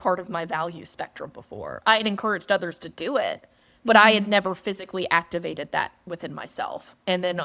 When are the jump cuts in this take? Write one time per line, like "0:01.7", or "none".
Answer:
none